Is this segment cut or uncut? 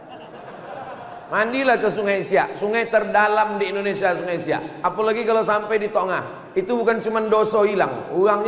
uncut